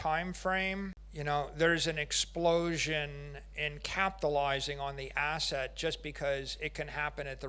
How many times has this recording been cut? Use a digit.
1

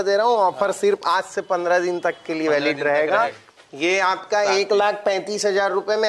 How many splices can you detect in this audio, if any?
1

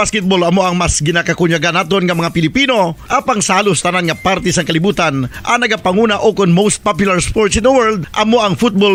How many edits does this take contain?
0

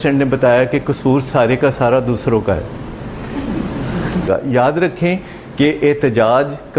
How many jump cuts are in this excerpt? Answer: 1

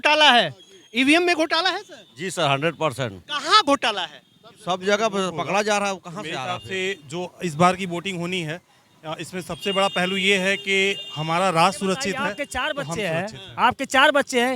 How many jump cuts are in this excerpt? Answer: 2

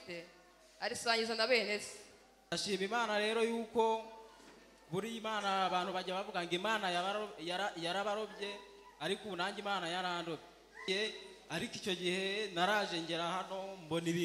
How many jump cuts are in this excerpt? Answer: 2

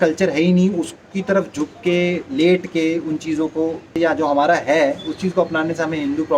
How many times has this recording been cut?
1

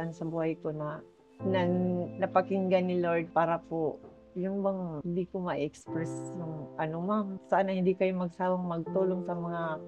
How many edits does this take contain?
1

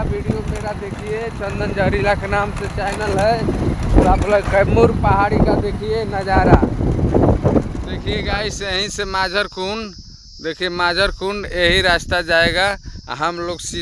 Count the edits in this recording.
1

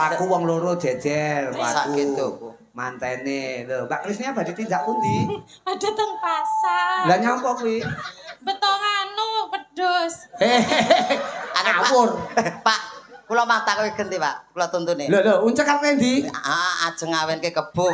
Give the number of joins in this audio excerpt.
0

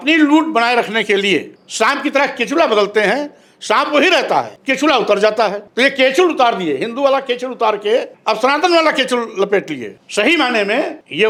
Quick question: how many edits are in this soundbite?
0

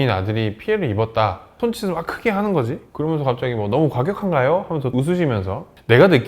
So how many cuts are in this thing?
1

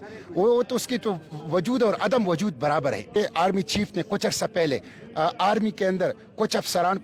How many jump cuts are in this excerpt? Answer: 1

